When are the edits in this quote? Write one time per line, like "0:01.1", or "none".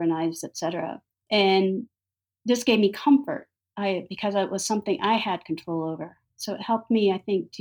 0:01.1